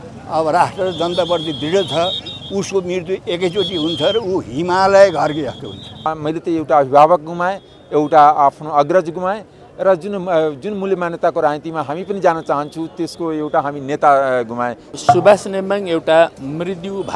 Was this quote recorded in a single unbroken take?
no; 2 cuts; at 6.1 s, 15.0 s

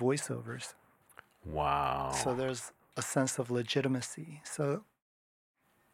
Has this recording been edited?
no; 0 cuts

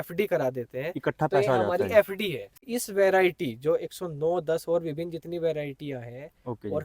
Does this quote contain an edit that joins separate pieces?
yes; 1 cut; at 2.7 s

